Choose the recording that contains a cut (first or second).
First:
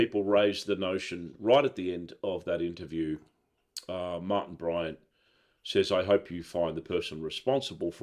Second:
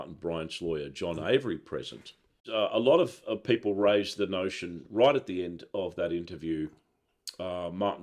second